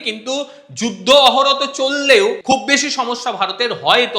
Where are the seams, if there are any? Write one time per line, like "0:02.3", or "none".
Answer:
0:02.4